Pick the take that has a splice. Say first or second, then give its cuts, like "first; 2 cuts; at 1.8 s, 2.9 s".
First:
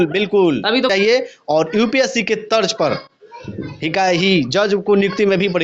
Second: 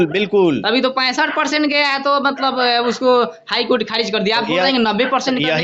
first; 1 cut; at 0.9 s